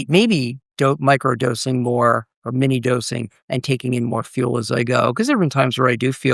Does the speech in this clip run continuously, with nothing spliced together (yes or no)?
yes